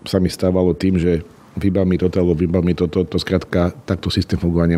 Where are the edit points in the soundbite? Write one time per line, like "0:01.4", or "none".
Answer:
none